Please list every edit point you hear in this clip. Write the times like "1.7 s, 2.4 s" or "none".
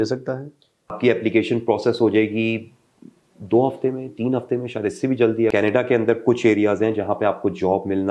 1.0 s, 5.5 s